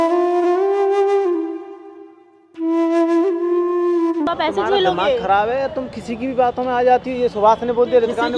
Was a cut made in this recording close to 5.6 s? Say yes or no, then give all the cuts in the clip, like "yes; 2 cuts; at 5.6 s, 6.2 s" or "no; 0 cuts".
no; 1 cut; at 4.3 s